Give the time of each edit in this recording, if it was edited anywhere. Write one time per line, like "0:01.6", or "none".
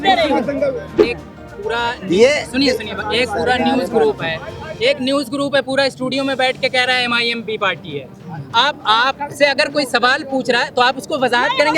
0:01.0